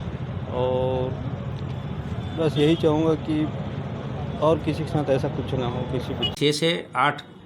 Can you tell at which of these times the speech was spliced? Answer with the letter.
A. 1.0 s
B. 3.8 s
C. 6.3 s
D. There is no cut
C